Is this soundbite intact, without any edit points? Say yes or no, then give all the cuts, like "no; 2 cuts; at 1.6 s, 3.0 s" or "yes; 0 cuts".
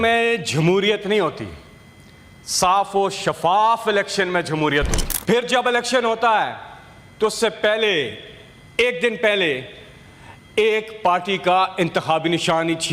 no; 1 cut; at 5.0 s